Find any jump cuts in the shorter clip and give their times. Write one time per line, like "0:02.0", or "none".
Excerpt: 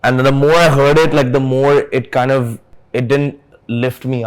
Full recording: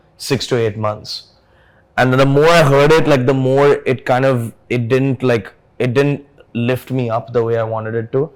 0:02.7